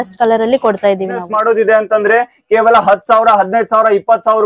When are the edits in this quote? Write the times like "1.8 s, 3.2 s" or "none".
1.2 s